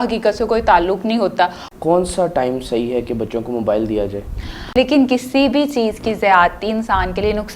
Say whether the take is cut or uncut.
cut